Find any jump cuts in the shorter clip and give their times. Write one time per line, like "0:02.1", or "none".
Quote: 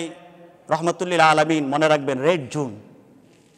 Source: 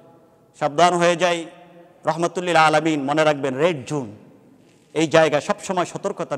none

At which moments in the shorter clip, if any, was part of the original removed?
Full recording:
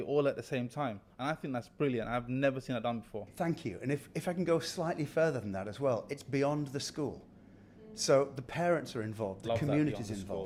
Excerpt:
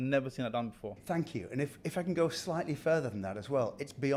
none

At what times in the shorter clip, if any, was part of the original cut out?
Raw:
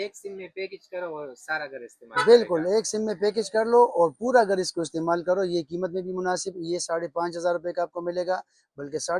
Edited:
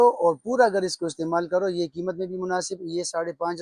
none

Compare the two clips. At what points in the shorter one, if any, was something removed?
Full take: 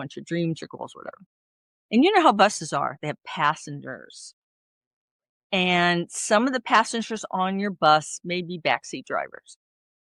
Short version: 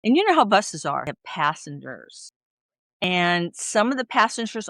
0:01.0
0:03.0

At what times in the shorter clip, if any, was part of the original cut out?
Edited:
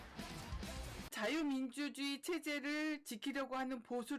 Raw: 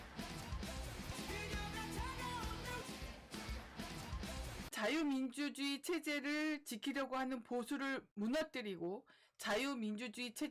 0:01.0

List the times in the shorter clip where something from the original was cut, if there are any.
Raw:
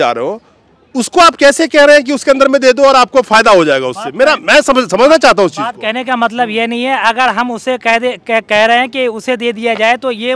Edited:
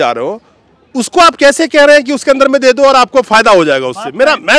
none

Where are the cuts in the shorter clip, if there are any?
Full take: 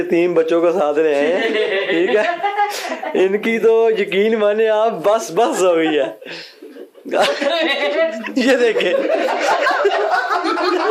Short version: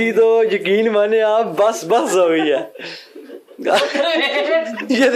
none

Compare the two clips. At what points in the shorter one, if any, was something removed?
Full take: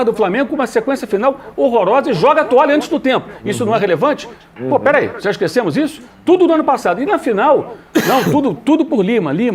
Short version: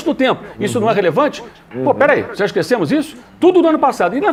none

